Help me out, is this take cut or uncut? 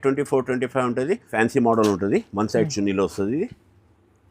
cut